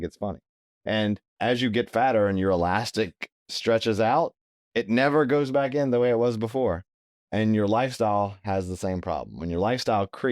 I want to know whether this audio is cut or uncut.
cut